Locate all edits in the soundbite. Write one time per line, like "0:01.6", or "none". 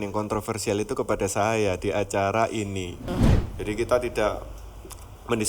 0:03.2